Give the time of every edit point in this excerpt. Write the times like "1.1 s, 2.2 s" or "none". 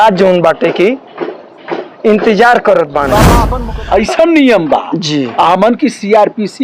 3.3 s